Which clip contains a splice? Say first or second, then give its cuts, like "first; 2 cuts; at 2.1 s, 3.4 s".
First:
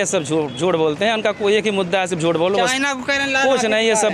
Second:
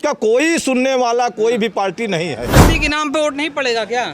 second; 1 cut; at 2.5 s